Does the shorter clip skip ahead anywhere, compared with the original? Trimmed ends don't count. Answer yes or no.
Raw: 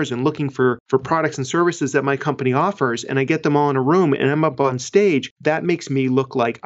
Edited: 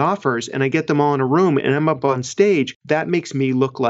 no